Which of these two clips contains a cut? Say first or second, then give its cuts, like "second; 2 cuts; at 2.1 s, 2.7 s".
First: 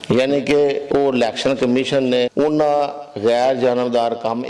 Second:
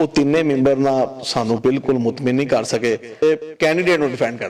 second; 1 cut; at 3.2 s